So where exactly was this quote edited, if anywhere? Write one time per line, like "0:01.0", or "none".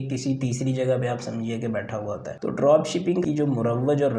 0:02.3
0:03.2